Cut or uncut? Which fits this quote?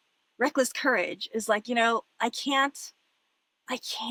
uncut